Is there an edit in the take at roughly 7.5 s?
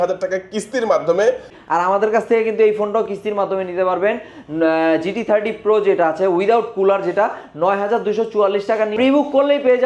no; 2 cuts; at 1.5 s, 8.9 s

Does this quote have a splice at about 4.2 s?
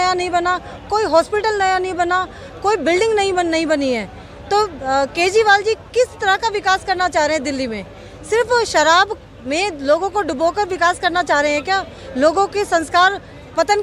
no; 0 cuts

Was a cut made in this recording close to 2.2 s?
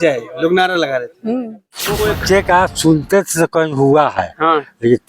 yes; 1 cut; at 2.2 s

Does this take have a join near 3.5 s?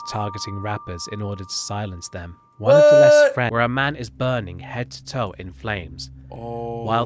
yes; 1 cut; at 3.5 s

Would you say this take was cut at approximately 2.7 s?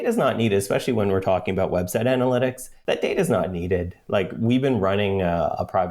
yes; 1 cut; at 2.7 s

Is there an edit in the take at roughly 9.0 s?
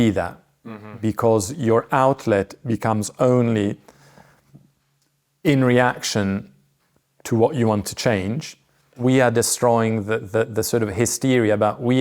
yes; 1 cut; at 9.0 s

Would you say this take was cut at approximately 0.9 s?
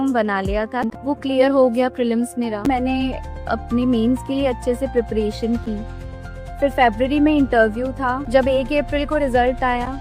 yes; 3 cuts; at 0.9 s, 2.7 s, 8.2 s

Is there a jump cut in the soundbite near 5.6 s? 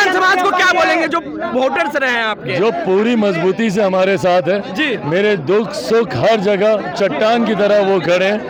no; 0 cuts

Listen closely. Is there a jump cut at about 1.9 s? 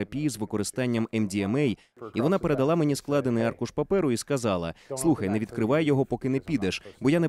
yes; 1 cut; at 1.9 s

